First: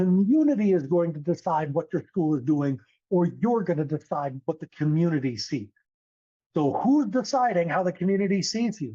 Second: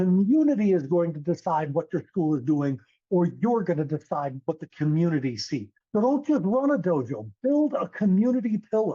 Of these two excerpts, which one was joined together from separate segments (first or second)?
second